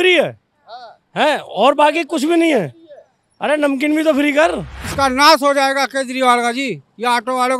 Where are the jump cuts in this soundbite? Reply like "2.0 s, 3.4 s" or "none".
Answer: 4.8 s